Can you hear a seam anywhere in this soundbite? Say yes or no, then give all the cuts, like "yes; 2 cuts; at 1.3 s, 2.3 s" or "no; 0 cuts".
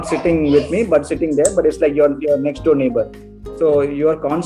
no; 0 cuts